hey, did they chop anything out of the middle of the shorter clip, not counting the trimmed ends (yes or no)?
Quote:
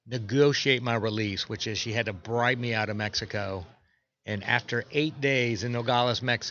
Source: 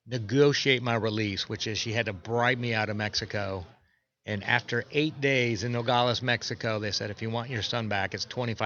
no